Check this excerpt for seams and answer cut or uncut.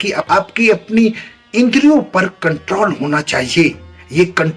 uncut